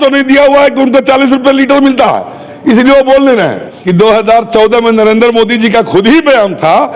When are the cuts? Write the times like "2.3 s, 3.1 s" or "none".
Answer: 3.7 s